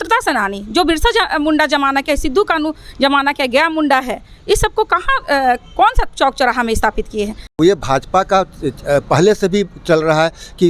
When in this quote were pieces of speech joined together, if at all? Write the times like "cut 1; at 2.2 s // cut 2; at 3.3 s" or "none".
cut 1; at 7.6 s